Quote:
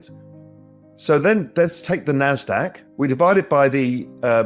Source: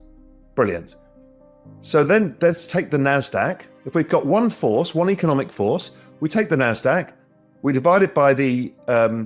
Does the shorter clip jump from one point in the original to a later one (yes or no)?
yes